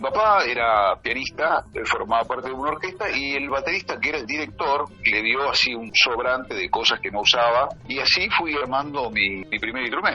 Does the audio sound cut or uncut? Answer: uncut